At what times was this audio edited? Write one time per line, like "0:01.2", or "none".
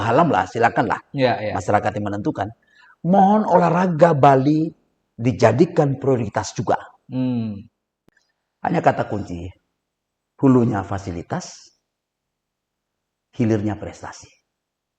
0:08.0